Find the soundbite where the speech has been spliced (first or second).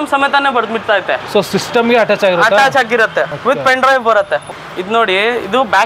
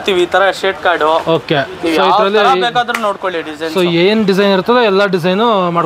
first